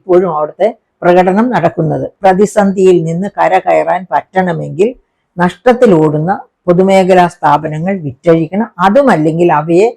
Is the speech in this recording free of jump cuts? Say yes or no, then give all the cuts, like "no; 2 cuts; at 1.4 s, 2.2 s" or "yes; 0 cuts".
no; 1 cut; at 2.1 s